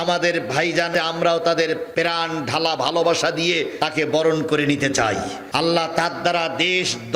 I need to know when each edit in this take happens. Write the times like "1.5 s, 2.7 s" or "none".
0.9 s, 1.9 s, 3.7 s, 5.4 s